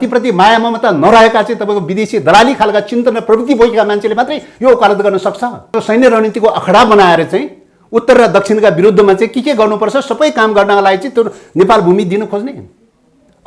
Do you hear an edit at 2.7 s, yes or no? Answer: no